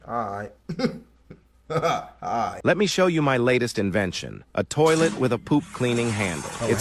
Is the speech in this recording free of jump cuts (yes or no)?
no